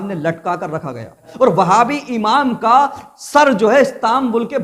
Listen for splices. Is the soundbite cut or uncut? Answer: cut